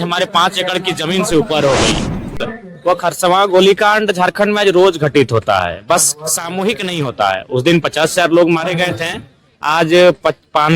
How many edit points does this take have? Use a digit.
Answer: 1